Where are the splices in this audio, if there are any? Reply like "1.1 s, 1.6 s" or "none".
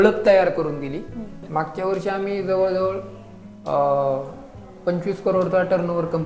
1.4 s